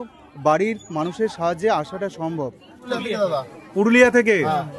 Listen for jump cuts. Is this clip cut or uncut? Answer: cut